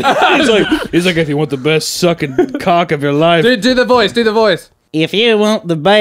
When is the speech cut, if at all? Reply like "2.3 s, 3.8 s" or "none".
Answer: 4.7 s